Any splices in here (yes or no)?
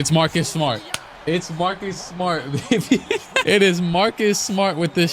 no